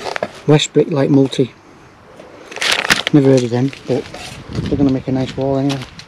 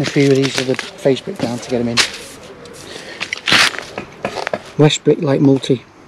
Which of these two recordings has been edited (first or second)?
second